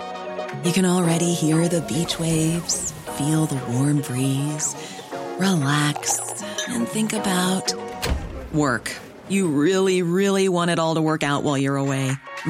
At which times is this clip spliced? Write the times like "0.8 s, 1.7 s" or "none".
none